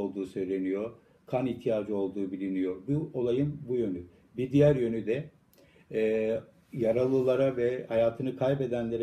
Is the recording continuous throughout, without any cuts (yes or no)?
no